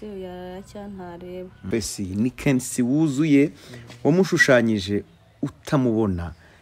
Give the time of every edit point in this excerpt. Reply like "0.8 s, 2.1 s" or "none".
1.6 s